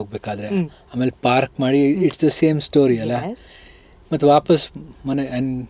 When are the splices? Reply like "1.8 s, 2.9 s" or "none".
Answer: none

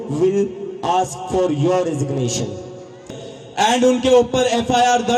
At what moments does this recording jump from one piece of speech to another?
3.0 s

